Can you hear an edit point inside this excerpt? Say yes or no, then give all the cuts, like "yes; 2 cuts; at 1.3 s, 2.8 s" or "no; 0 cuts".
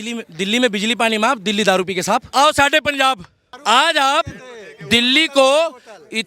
yes; 2 cuts; at 2.3 s, 3.5 s